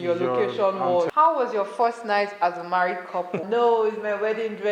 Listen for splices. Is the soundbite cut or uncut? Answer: cut